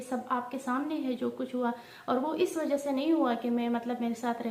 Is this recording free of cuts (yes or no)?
yes